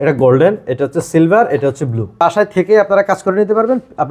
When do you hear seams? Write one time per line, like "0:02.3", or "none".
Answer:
0:02.2